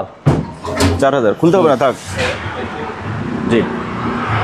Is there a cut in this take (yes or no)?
yes